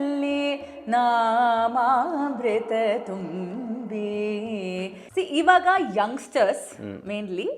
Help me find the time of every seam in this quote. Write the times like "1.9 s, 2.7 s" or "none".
5.0 s